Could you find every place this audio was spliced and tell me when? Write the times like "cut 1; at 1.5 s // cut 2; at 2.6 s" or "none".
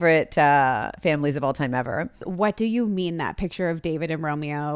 cut 1; at 2.2 s